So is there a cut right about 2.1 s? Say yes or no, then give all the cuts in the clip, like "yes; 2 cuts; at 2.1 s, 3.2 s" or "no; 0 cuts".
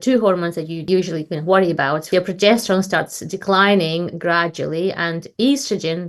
yes; 2 cuts; at 0.8 s, 2.1 s